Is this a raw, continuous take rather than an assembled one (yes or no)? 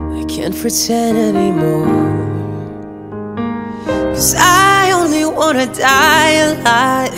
yes